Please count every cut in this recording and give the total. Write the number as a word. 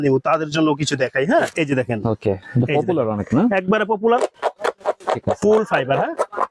one